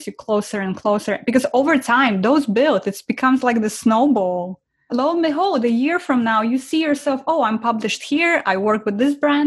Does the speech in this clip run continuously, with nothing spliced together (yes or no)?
yes